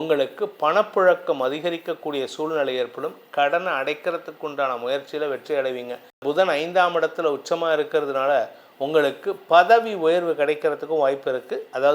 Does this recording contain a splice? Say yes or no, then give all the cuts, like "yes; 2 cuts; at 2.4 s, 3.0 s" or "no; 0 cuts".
yes; 1 cut; at 6.2 s